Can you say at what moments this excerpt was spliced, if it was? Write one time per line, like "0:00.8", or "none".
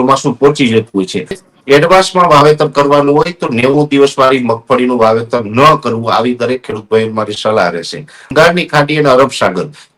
0:01.5
0:08.3